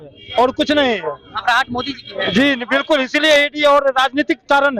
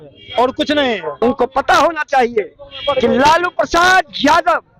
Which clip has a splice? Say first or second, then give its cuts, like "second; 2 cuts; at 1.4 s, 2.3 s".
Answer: second; 1 cut; at 1.1 s